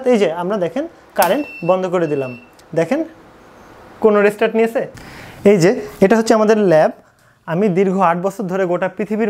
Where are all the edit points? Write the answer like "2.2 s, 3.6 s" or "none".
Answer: 5.0 s